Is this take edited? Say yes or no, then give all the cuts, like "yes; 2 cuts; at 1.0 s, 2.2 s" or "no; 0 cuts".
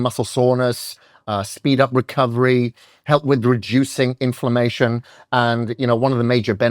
no; 0 cuts